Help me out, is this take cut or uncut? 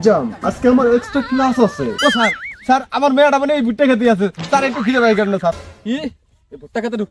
cut